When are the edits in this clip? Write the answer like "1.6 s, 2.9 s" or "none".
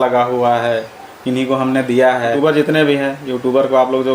2.4 s